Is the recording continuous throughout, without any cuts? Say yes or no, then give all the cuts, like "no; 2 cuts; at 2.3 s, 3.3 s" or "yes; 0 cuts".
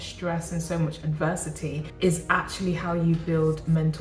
no; 1 cut; at 1.9 s